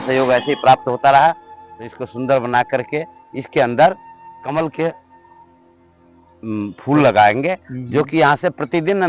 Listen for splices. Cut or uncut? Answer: uncut